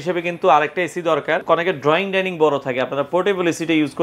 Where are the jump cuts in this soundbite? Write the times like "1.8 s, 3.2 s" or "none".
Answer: 1.4 s